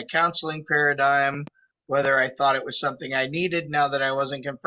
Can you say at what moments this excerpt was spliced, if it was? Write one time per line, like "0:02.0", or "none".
none